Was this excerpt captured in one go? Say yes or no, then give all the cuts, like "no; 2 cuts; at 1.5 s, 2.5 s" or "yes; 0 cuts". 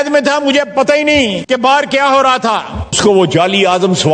no; 2 cuts; at 1.4 s, 3.0 s